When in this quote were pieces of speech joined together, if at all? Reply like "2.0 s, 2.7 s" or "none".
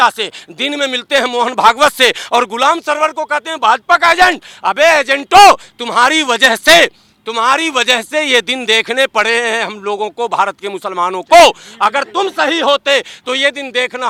none